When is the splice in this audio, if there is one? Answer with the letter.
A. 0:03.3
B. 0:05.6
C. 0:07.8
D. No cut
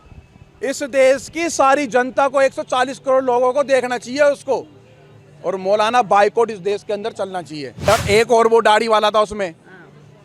C